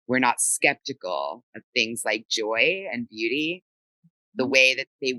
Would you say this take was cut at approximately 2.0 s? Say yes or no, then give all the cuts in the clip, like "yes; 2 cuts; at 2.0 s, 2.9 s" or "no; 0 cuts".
no; 0 cuts